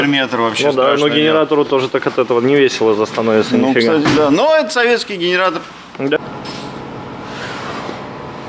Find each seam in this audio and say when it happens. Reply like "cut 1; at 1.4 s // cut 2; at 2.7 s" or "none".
cut 1; at 6.2 s